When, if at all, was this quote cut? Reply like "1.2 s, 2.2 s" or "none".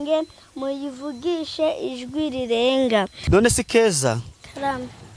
3.2 s